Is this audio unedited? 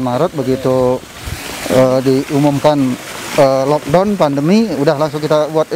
yes; 0 cuts

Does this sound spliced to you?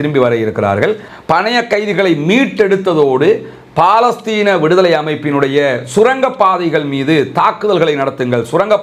no; 0 cuts

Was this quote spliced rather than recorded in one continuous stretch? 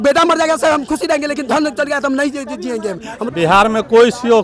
yes; 1 cut; at 3.3 s

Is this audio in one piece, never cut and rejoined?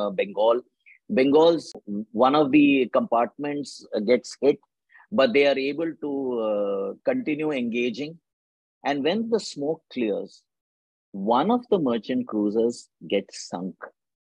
no; 1 cut; at 1.7 s

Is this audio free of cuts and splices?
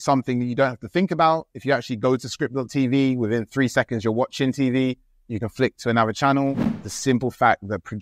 no; 1 cut; at 6.7 s

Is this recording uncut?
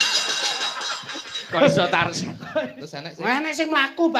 no; 1 cut; at 2.3 s

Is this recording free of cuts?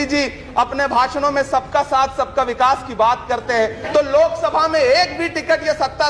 no; 1 cut; at 3.8 s

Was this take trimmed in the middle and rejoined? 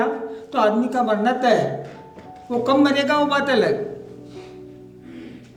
no; 0 cuts

